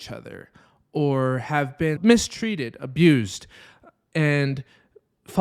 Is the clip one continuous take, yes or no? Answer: no